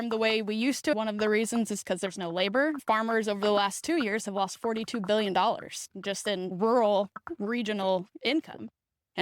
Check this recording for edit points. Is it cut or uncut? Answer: cut